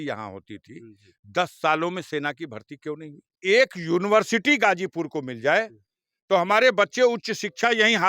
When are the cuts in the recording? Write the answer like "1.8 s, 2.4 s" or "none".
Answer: 3.3 s